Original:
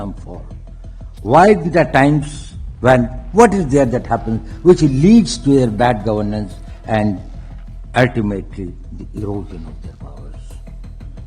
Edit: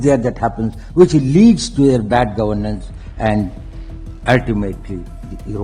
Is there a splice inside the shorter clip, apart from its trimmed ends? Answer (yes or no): no